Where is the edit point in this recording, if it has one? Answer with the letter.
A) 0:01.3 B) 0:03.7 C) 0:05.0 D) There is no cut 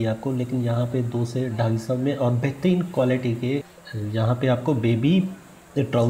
B